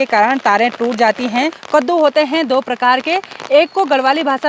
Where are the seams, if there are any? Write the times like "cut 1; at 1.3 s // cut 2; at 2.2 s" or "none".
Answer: cut 1; at 1.6 s

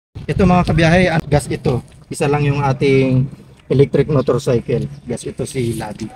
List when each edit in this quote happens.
cut 1; at 1.2 s

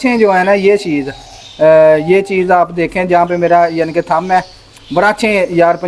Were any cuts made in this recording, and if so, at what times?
none

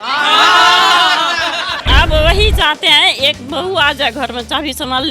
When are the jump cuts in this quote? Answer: cut 1; at 1.8 s

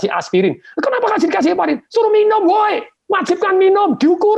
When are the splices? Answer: cut 1; at 2.9 s

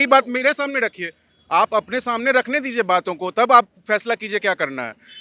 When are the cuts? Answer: none

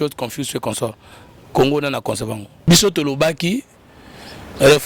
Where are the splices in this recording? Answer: cut 1; at 2.5 s

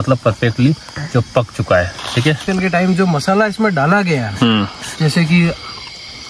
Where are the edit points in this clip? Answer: cut 1; at 2.4 s

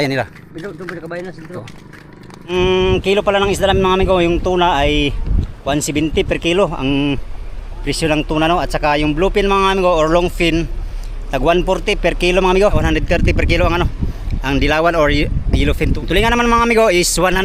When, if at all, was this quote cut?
cut 1; at 2.5 s // cut 2; at 12.9 s // cut 3; at 15.9 s

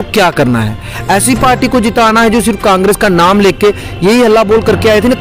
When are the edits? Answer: none

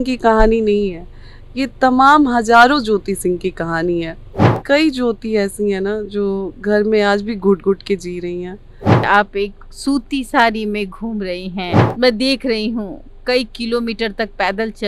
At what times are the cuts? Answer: cut 1; at 4.6 s // cut 2; at 9.1 s

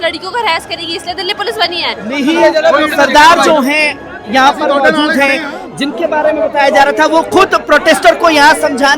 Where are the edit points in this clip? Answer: cut 1; at 2.1 s

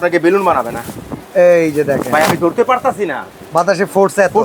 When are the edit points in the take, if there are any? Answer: none

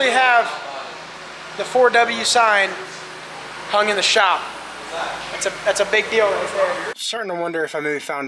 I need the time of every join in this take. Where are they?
cut 1; at 7.0 s

